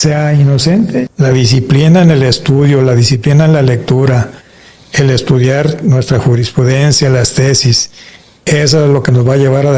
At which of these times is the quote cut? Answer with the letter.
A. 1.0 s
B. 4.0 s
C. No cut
A